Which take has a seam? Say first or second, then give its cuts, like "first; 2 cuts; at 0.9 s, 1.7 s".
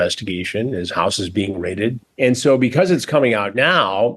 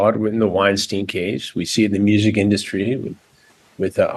first; 1 cut; at 2.0 s